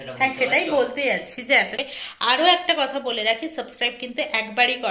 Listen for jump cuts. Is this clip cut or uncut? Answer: cut